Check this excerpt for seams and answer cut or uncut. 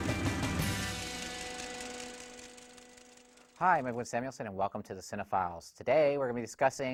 uncut